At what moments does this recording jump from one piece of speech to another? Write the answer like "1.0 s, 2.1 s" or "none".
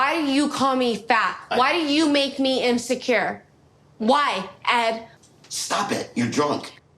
none